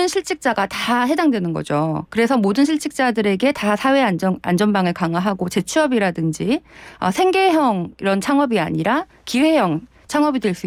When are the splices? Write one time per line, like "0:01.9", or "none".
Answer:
none